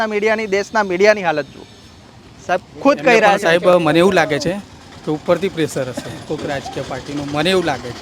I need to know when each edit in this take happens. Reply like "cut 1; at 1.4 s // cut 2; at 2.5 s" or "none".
none